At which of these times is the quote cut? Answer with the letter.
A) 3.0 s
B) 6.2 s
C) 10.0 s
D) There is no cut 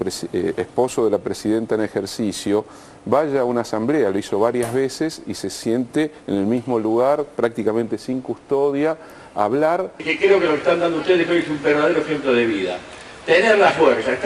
C